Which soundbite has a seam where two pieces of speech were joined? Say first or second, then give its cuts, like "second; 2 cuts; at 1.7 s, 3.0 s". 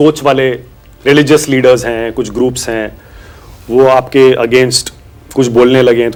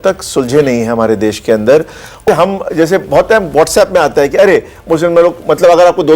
second; 1 cut; at 2.2 s